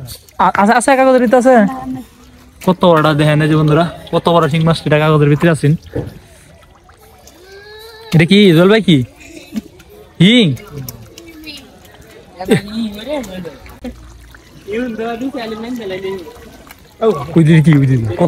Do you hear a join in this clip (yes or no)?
yes